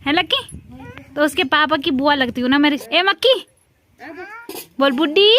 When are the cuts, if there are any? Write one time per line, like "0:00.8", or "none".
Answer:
0:02.8